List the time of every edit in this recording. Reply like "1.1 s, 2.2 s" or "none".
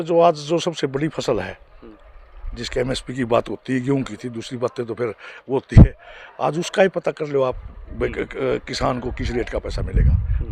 none